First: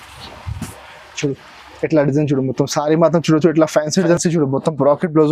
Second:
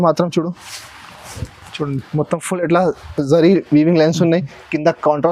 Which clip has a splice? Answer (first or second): first